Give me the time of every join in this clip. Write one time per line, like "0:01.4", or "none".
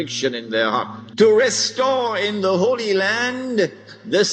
0:01.0